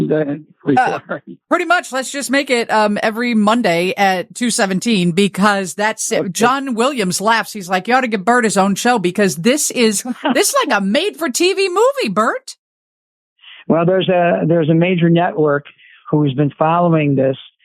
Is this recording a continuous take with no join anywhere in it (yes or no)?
no